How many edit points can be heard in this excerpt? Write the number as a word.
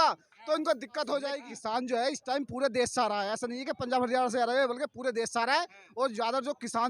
one